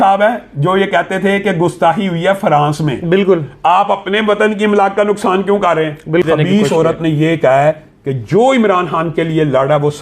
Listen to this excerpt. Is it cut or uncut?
cut